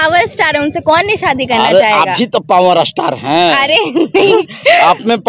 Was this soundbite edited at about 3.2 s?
no; 0 cuts

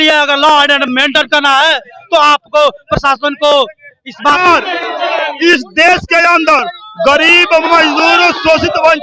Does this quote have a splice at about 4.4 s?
yes; 1 cut; at 4.4 s

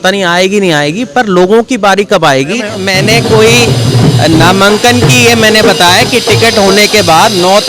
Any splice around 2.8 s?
yes; 1 cut; at 2.8 s

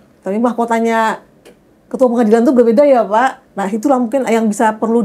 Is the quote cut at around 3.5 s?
yes; 1 cut; at 3.5 s

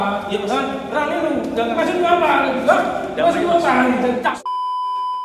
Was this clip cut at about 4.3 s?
yes; 1 cut; at 4.3 s

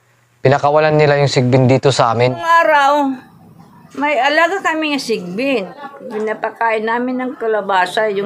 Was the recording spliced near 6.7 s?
no; 1 cut; at 2.4 s

